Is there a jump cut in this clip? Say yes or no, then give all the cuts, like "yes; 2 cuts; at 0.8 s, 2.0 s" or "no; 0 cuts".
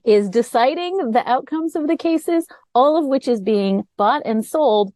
no; 0 cuts